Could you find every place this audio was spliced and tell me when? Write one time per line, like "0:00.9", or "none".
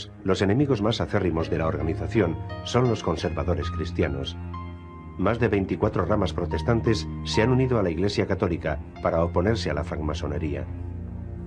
none